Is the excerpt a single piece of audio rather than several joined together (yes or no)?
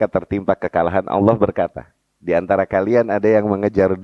yes